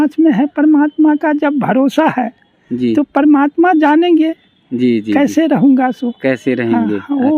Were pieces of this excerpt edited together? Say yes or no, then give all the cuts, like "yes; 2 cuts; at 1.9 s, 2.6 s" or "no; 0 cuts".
no; 0 cuts